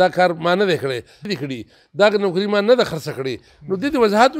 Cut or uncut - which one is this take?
cut